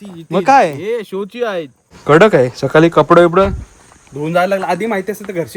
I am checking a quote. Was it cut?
yes; 1 cut; at 1.9 s

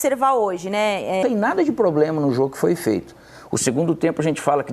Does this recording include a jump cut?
yes; 1 cut; at 1.2 s

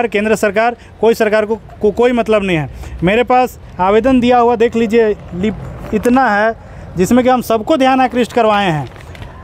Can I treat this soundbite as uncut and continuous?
yes; 0 cuts

